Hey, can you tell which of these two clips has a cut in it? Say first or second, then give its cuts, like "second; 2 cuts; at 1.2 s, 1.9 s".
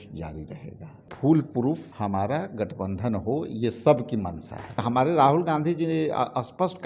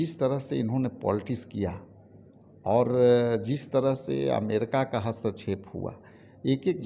first; 3 cuts; at 1.1 s, 1.9 s, 4.8 s